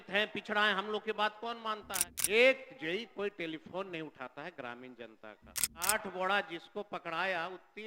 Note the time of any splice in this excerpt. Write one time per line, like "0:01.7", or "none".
0:01.9
0:05.9